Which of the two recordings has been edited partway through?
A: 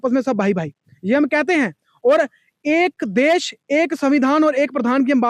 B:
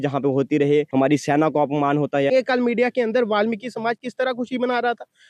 B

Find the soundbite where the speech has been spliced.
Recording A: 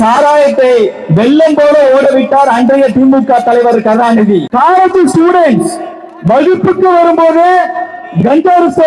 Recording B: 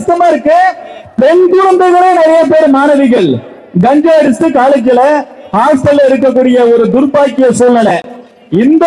A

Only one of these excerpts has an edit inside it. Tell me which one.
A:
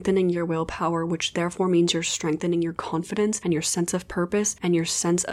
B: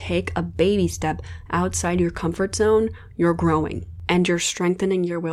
A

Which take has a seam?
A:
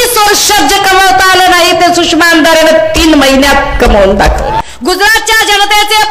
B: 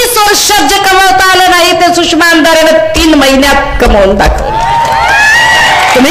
A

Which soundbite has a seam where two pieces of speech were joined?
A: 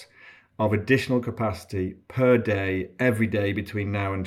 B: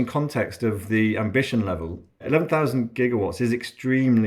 B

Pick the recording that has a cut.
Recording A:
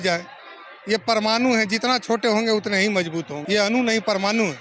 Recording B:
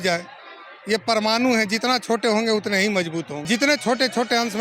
B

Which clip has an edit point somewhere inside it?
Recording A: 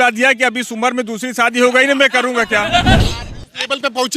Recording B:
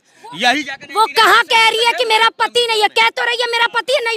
A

